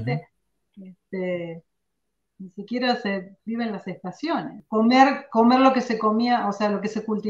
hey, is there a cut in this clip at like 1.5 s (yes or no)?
no